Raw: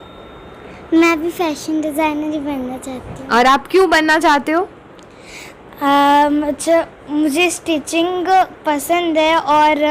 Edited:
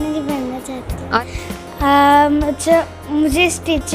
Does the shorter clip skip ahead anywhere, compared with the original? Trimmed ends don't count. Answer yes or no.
yes